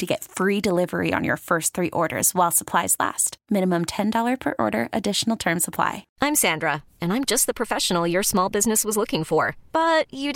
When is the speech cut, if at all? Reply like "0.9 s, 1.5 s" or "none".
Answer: 6.0 s